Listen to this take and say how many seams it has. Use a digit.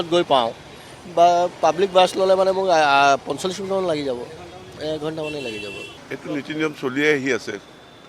1